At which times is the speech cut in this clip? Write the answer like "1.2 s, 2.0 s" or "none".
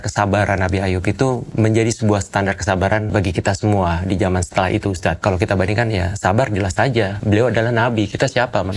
1.5 s, 3.1 s, 5.2 s, 7.2 s